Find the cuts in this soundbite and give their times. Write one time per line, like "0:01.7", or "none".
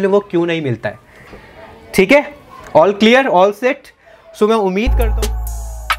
0:05.0

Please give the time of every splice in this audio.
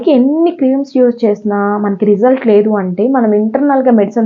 none

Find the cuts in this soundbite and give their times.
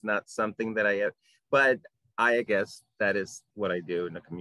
0:02.5
0:03.4

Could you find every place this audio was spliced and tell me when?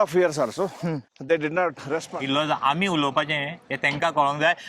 0:01.1
0:02.1

